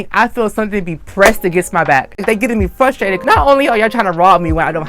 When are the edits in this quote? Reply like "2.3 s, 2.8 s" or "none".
2.2 s